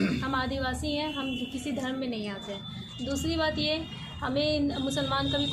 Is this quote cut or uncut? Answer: uncut